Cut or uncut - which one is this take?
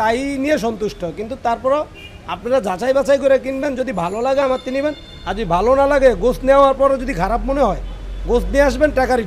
uncut